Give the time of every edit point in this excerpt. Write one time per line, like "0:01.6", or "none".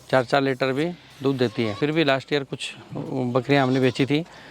0:01.8

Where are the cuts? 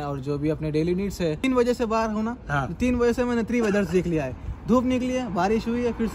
0:01.4

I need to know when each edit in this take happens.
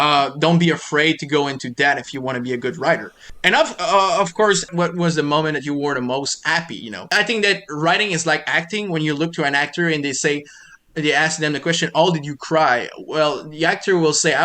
0:03.3
0:04.7
0:07.1

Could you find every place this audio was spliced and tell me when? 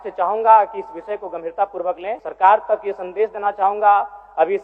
0:02.2

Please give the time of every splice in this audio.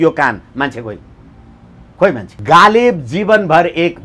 0:02.3

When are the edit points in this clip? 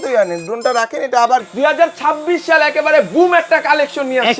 0:01.5

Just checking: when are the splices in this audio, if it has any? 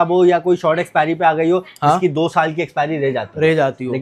none

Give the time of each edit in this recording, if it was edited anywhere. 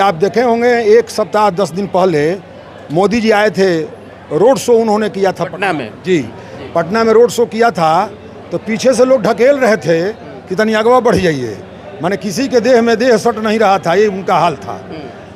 none

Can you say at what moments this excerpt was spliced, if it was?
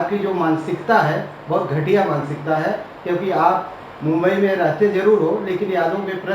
none

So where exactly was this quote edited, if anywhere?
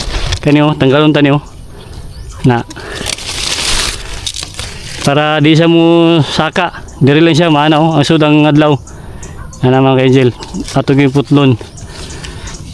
0:04.6

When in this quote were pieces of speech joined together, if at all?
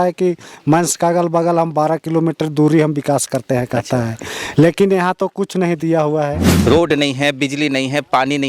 0:06.5

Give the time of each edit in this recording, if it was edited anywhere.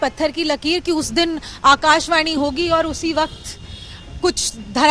none

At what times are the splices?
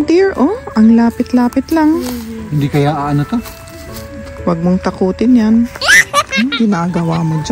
0:05.8

